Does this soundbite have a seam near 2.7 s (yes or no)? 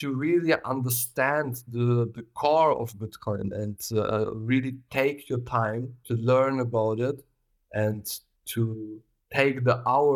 no